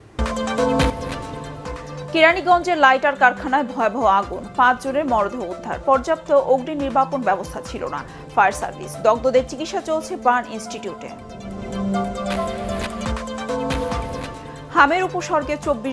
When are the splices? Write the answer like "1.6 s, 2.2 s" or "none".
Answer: 0.9 s

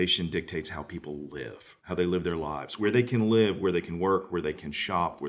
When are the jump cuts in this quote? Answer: 1.8 s, 2.8 s

